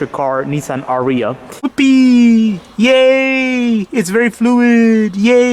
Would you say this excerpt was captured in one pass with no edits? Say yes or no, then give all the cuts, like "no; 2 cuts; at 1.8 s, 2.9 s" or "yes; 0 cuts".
no; 1 cut; at 1.7 s